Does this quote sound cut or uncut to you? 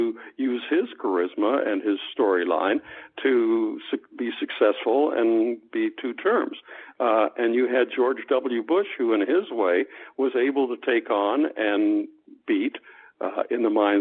uncut